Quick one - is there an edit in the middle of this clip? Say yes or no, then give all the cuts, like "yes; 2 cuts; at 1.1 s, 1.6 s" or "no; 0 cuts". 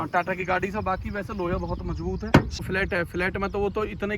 yes; 1 cut; at 2.6 s